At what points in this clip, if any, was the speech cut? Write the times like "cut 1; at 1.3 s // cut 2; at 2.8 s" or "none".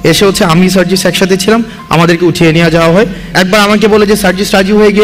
cut 1; at 3.3 s